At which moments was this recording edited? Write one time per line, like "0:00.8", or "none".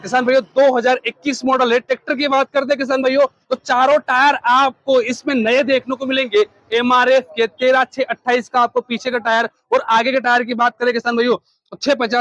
none